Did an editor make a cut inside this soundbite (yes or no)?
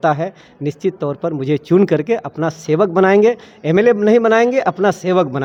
no